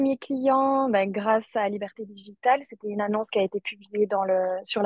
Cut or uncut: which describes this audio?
uncut